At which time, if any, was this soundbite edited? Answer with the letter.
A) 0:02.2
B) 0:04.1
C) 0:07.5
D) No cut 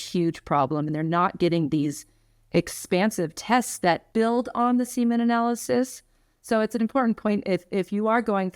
B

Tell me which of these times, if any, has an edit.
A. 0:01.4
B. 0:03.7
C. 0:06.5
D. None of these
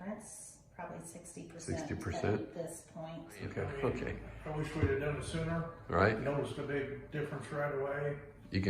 B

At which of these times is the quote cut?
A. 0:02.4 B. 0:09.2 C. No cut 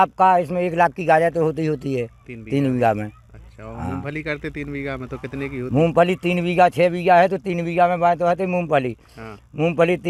C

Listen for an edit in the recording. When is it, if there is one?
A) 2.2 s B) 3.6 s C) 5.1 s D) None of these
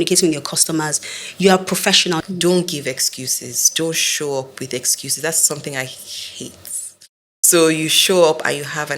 A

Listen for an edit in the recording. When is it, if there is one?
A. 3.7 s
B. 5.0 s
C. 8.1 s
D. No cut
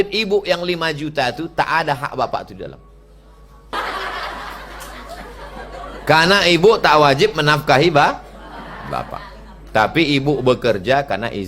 A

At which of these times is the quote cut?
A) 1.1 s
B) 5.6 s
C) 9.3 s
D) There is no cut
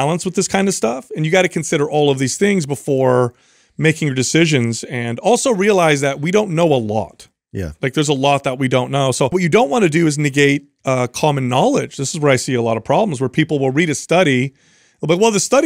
C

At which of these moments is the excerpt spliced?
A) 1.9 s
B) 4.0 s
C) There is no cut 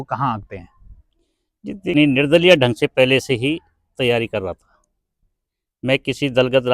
A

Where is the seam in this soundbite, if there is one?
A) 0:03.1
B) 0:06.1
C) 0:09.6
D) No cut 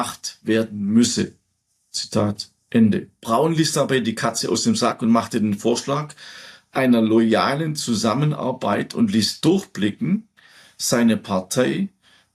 A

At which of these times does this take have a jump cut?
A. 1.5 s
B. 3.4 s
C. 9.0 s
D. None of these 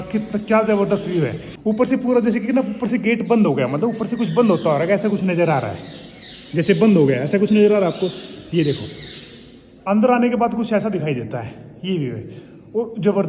A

